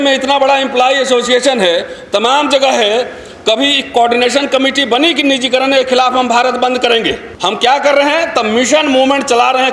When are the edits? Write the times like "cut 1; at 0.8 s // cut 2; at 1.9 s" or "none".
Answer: cut 1; at 7.3 s

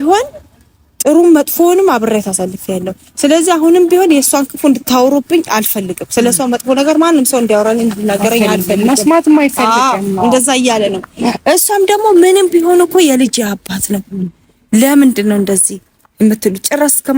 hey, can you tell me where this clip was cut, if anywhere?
none

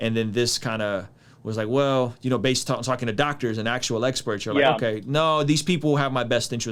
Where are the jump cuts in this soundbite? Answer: none

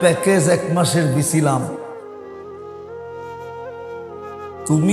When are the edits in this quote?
cut 1; at 1.7 s // cut 2; at 4.0 s

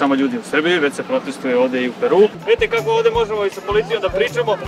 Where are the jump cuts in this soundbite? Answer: cut 1; at 2.4 s

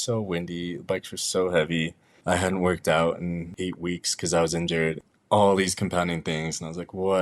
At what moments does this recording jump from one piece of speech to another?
cut 1; at 3.5 s // cut 2; at 5.1 s

